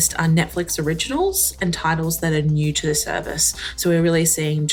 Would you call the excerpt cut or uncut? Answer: uncut